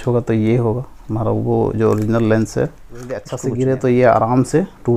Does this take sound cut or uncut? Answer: cut